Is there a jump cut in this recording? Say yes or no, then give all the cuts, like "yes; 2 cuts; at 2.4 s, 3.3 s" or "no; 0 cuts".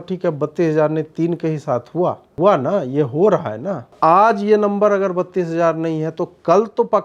yes; 2 cuts; at 2.3 s, 3.9 s